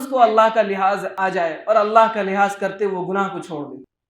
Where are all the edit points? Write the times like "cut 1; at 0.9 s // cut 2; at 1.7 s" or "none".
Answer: cut 1; at 1.1 s